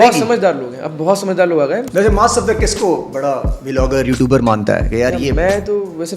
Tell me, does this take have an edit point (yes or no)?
yes